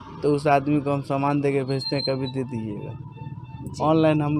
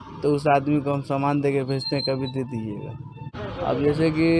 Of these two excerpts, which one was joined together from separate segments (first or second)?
second